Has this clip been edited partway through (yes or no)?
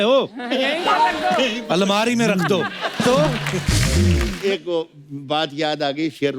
yes